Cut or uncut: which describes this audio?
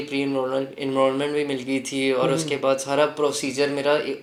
uncut